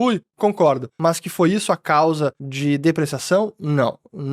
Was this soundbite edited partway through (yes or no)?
yes